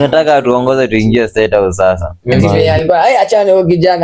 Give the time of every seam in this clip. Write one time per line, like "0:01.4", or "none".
0:02.5